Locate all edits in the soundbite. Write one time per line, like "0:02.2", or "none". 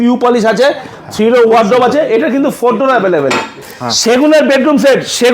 0:03.7